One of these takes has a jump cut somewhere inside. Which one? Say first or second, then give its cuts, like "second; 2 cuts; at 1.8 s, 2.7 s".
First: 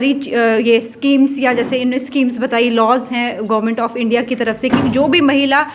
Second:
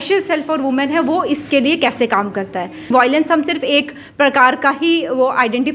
second; 1 cut; at 2.9 s